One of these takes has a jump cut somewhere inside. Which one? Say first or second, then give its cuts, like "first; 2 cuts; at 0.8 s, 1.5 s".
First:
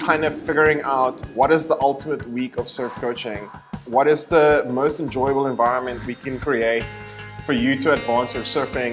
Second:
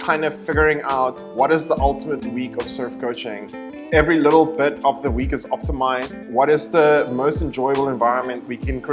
first; 1 cut; at 3.7 s